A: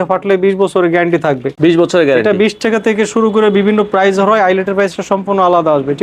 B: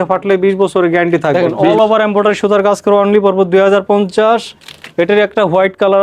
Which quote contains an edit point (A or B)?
B